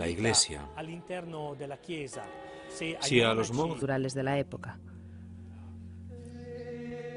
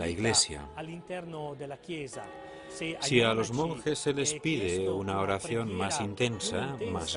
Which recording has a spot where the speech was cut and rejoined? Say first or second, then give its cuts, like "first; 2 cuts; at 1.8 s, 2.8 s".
second; 1 cut; at 3.8 s